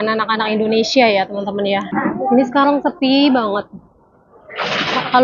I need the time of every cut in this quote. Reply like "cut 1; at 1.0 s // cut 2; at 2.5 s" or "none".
cut 1; at 1.9 s